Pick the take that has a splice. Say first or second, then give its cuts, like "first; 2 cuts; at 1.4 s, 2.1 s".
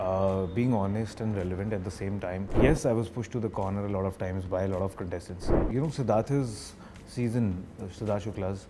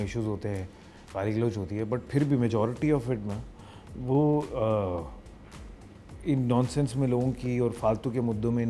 first; 2 cuts; at 2.5 s, 5.5 s